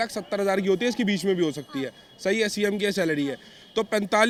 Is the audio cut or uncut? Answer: uncut